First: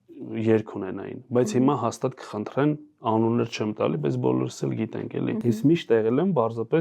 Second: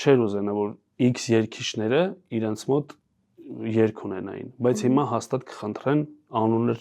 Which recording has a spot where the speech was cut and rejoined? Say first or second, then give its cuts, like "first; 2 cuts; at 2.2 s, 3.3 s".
first; 1 cut; at 5.4 s